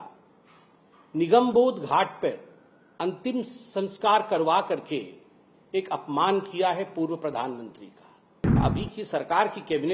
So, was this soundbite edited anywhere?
yes; 1 cut; at 8.6 s

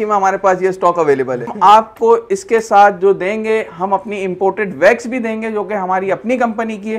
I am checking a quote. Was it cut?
yes; 1 cut; at 1.5 s

